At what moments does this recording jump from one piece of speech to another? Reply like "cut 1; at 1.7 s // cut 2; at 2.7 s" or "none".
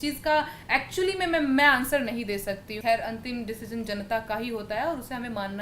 cut 1; at 2.8 s